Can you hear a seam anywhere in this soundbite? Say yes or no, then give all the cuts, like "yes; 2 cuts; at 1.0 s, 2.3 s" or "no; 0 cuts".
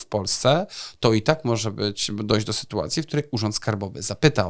no; 0 cuts